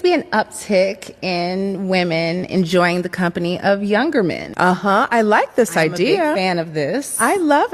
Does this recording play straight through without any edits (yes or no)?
yes